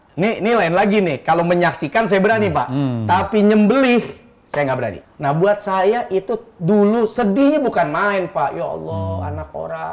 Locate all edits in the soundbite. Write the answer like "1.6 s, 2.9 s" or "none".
5.0 s

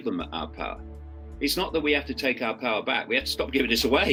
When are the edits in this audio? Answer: none

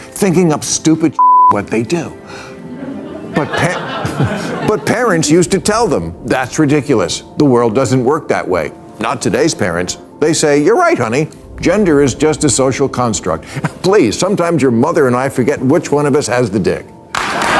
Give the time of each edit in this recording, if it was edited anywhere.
none

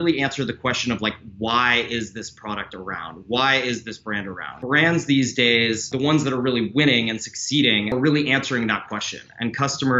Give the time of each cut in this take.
4.5 s, 5.9 s, 7.9 s

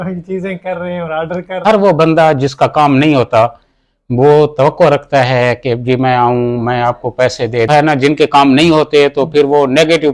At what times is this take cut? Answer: 1.6 s, 7.7 s

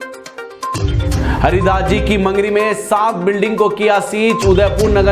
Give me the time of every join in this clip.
none

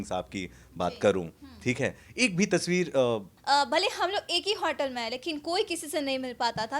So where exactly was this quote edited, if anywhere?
3.3 s

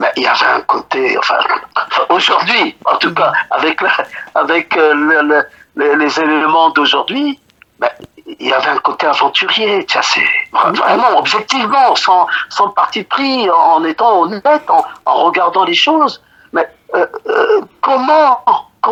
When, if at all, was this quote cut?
none

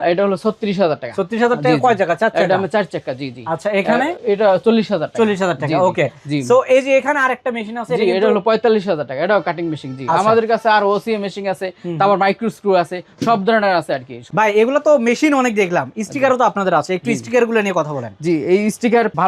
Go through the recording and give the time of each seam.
none

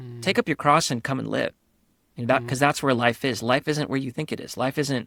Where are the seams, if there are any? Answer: none

